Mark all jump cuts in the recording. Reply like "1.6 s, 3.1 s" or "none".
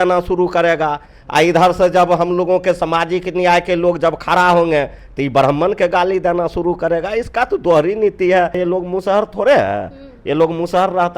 8.6 s